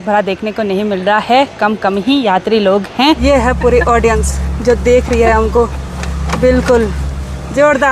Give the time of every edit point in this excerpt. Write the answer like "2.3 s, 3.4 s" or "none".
3.2 s